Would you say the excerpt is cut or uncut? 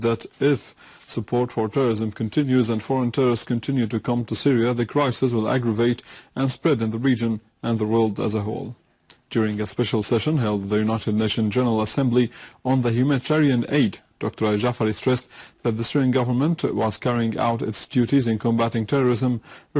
cut